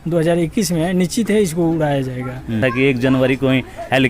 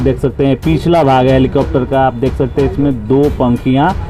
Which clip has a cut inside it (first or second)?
first